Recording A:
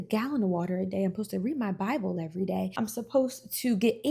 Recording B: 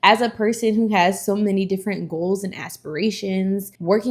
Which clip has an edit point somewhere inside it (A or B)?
A